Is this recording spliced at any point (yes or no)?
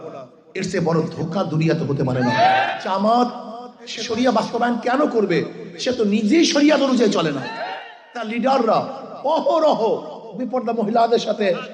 yes